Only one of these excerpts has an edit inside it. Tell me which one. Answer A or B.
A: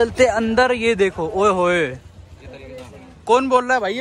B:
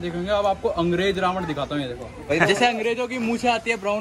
B